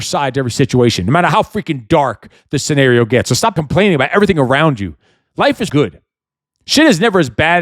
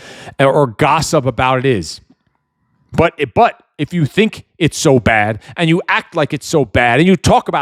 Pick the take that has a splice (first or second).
first